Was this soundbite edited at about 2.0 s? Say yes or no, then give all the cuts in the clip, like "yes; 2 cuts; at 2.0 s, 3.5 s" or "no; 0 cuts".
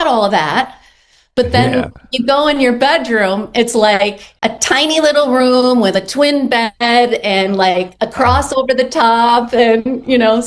no; 1 cut; at 4.2 s